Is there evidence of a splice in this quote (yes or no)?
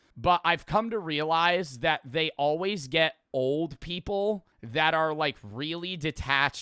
yes